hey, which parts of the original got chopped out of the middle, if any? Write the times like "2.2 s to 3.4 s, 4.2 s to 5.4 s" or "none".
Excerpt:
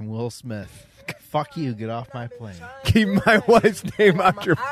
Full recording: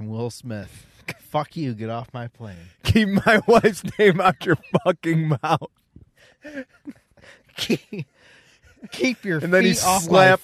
none